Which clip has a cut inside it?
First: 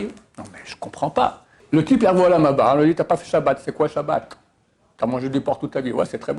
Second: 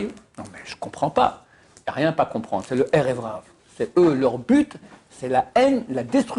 first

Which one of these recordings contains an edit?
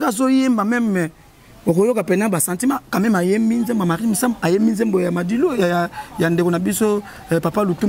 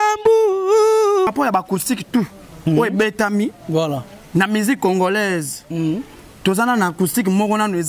second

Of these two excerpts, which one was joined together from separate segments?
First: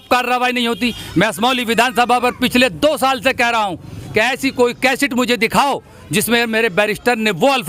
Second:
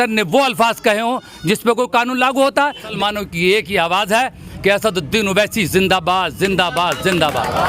second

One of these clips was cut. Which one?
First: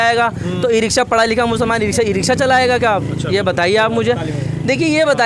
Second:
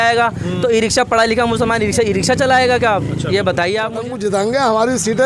second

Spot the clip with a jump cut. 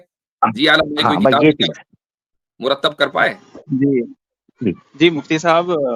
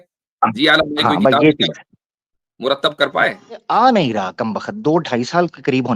second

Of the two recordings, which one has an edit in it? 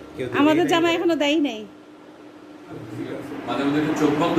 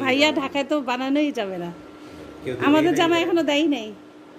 first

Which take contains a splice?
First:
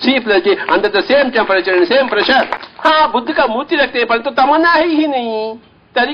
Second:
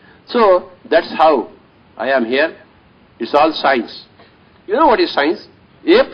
first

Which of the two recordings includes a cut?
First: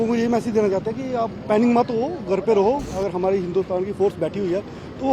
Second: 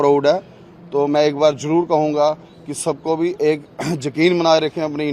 first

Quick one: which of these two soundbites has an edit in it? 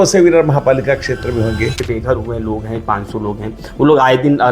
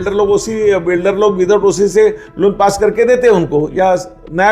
first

